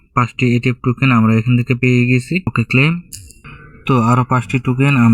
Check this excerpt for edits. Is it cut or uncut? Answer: cut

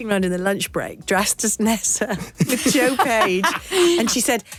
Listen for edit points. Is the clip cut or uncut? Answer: uncut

